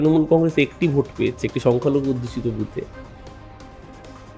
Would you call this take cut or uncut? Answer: uncut